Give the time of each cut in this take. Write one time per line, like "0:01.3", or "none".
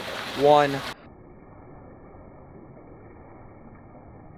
0:00.9